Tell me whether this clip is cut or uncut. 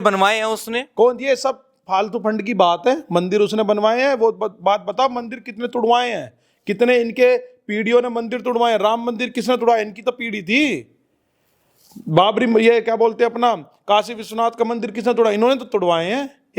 uncut